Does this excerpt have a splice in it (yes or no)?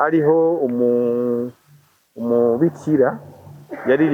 no